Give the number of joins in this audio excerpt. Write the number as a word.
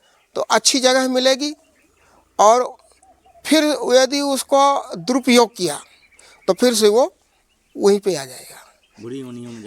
zero